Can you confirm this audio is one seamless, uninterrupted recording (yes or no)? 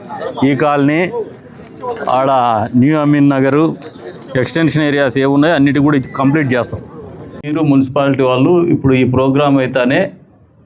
no